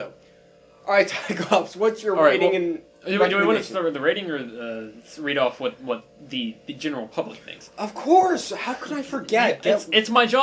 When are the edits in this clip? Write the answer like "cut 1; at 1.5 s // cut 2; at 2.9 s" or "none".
cut 1; at 9.1 s